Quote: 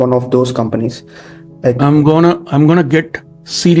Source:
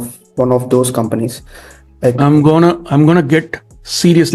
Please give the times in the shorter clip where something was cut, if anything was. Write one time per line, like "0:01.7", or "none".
none